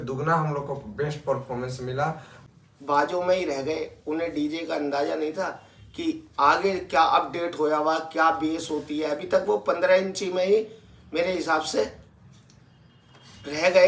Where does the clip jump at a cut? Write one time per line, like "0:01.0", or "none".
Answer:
0:02.4